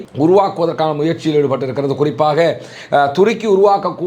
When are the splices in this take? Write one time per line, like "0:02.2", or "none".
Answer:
none

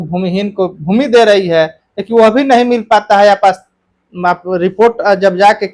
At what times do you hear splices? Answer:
none

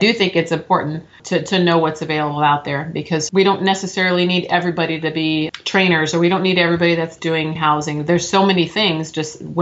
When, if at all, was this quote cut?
0:01.2
0:03.2
0:05.5

